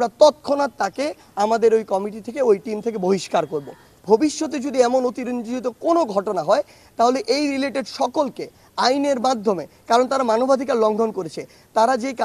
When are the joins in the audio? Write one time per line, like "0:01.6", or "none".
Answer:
0:03.9